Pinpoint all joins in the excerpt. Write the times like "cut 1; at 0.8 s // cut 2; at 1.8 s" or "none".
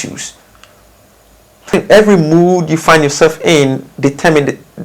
cut 1; at 1.7 s